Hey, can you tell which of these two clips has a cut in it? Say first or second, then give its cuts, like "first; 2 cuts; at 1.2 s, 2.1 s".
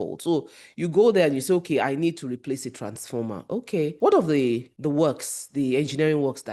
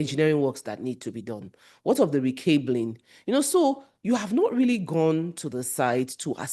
first; 2 cuts; at 3.9 s, 4.7 s